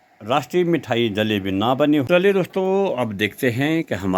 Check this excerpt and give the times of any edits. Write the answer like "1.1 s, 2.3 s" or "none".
2.1 s